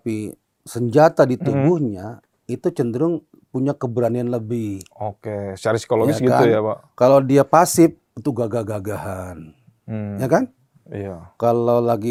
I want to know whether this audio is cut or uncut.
uncut